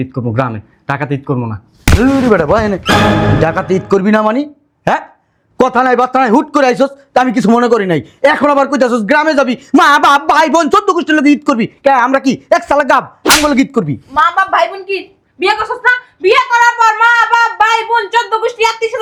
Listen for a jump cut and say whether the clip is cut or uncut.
uncut